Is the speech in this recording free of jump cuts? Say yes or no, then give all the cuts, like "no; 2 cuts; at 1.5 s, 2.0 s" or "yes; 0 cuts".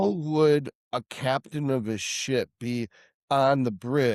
yes; 0 cuts